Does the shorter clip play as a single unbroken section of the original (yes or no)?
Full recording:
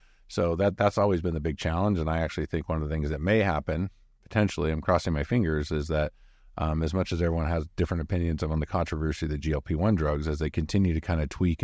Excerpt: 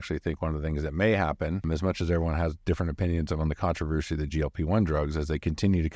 no